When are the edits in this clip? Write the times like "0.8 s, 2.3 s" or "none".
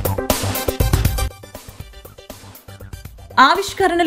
none